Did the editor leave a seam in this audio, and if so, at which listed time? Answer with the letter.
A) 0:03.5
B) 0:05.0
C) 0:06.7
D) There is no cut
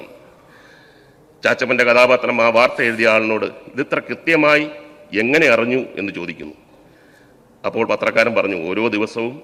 D